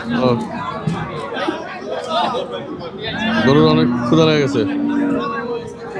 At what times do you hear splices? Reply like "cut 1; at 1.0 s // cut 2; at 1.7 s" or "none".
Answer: none